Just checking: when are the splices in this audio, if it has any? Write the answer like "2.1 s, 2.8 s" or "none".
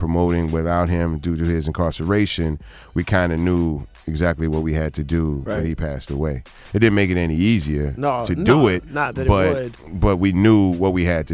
none